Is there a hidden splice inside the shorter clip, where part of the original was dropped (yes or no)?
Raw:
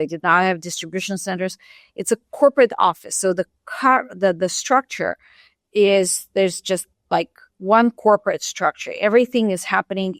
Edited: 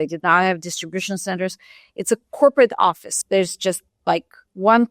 yes